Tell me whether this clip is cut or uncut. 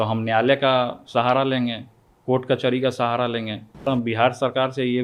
cut